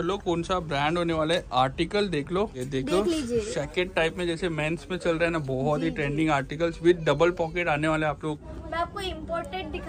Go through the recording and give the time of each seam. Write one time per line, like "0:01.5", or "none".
0:02.6
0:08.4

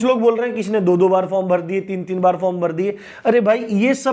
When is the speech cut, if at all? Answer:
none

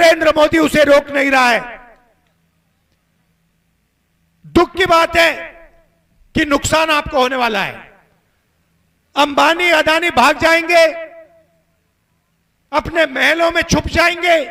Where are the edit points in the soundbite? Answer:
none

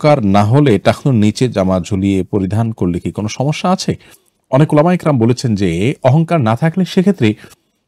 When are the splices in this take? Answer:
none

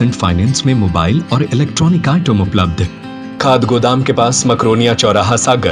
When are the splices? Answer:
0:03.4

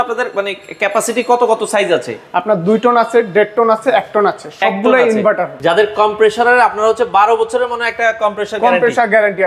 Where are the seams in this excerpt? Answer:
0:05.5

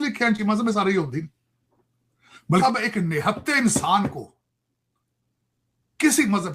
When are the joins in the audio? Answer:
0:02.6

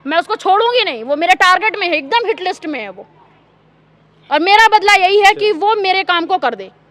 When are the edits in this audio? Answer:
none

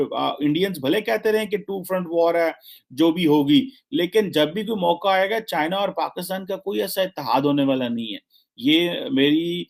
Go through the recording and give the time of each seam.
none

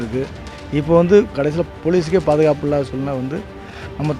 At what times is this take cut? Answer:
0:01.3

